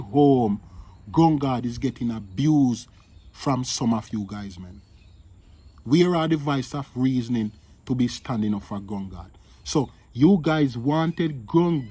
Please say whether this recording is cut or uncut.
uncut